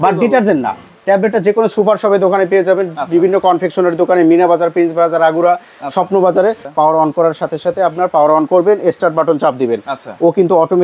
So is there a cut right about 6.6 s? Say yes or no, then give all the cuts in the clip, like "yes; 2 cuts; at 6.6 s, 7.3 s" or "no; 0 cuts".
yes; 1 cut; at 6.6 s